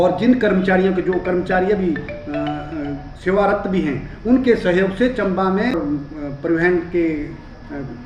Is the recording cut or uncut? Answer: cut